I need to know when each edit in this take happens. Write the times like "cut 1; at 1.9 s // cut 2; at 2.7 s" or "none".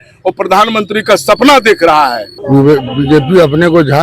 cut 1; at 2.3 s